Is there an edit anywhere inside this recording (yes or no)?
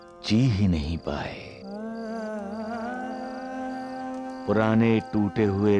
no